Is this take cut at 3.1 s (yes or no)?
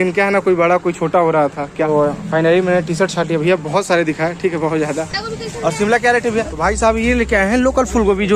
no